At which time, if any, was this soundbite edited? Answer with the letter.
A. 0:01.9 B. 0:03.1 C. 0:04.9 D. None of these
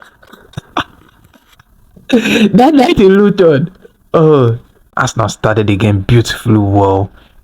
C